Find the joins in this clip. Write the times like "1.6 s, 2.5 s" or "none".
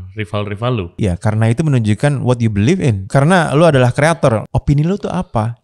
0.9 s, 3.0 s, 4.4 s